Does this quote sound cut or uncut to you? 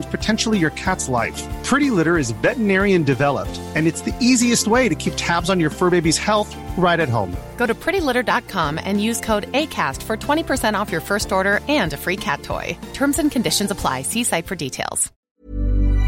cut